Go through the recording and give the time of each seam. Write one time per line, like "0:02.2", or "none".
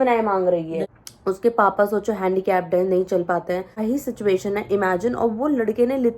0:00.9
0:03.8